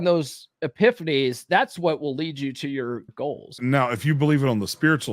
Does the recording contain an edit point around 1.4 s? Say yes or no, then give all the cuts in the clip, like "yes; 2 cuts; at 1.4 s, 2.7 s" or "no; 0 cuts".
no; 1 cut; at 3.5 s